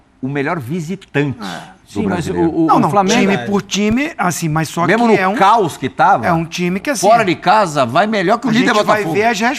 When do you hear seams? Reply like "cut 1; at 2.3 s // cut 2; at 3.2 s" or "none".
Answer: none